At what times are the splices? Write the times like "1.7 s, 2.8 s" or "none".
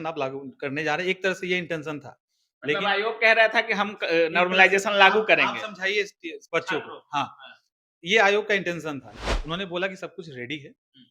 9.1 s